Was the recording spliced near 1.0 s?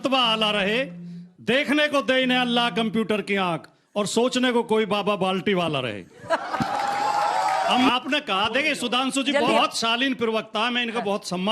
no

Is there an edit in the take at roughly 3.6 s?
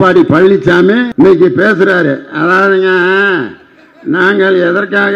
no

